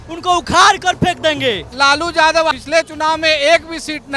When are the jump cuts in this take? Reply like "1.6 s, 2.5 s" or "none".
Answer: 1.7 s, 2.5 s

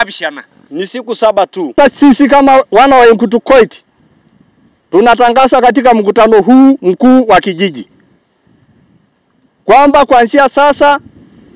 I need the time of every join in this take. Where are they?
1.8 s

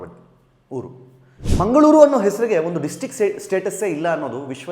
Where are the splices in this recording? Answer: 1.5 s

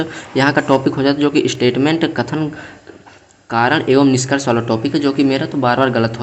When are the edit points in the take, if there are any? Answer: none

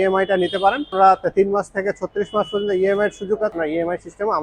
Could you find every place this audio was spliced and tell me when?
0.9 s, 3.5 s

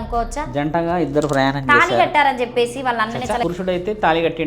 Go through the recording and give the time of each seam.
3.4 s

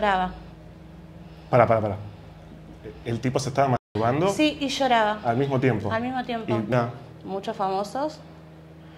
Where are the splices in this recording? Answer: 6.7 s

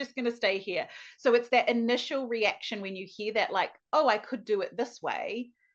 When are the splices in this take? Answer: none

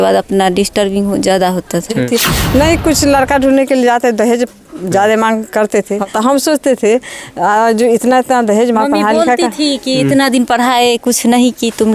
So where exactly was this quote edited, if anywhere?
2.1 s, 6.0 s

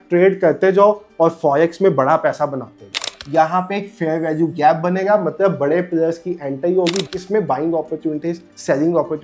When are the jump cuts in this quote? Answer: 3.1 s, 7.0 s

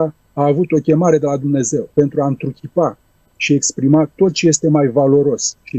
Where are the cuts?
1.9 s

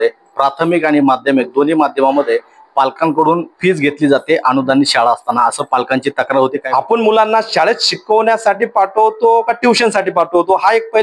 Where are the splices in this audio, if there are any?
6.6 s

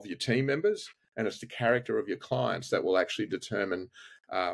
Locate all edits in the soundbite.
none

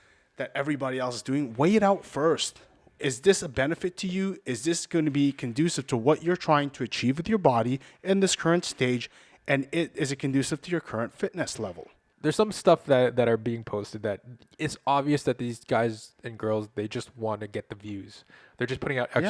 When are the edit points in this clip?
12.0 s

